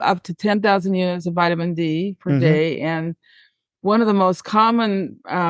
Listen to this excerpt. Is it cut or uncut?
uncut